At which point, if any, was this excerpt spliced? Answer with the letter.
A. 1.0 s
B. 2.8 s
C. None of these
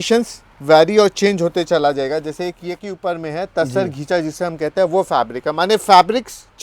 B